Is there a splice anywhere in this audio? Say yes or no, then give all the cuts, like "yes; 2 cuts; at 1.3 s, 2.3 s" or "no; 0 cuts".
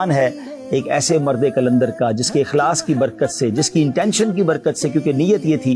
no; 0 cuts